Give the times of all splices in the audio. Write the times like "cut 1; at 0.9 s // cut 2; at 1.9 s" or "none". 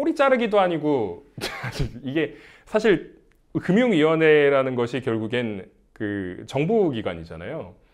none